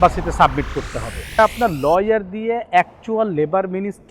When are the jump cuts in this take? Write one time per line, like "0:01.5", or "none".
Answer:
0:01.4